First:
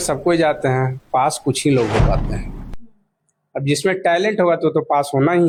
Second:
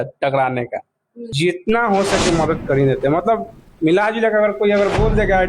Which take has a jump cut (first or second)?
second